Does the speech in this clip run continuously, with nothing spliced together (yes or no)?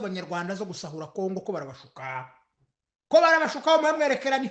yes